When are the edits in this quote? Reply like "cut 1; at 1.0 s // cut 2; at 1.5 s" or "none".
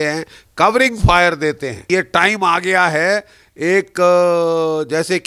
cut 1; at 1.8 s